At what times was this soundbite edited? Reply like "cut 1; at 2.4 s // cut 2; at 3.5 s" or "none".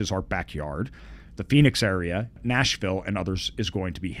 cut 1; at 2.3 s